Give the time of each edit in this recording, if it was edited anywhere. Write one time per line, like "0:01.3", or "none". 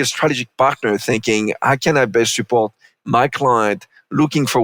none